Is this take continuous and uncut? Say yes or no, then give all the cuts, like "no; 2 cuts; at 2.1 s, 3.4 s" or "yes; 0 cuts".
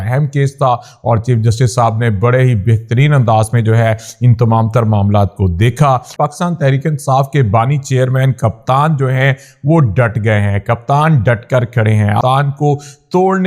no; 2 cuts; at 6.1 s, 12.2 s